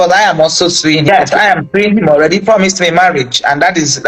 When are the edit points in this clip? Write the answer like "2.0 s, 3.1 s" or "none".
1.1 s